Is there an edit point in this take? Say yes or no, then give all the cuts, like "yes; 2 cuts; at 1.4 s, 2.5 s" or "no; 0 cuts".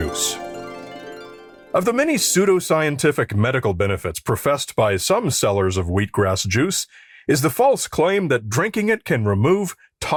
no; 0 cuts